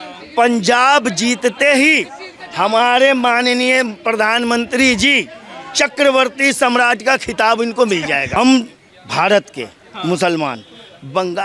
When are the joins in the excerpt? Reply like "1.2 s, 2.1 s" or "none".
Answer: 8.3 s